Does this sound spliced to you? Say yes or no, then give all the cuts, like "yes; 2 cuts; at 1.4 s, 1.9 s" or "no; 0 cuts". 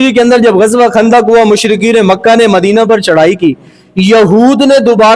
no; 0 cuts